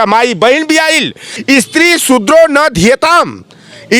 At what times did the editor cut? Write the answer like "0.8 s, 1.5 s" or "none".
1.3 s